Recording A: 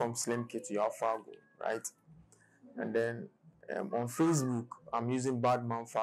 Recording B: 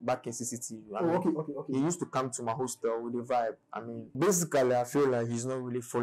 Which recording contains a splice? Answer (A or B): B